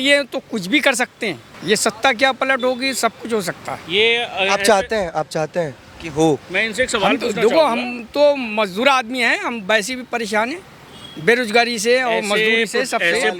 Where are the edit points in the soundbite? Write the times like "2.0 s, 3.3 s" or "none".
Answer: none